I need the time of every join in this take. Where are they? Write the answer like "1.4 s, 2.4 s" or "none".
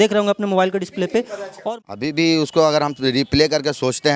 1.5 s